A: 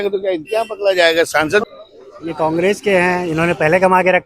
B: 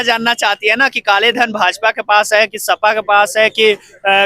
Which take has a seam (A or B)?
A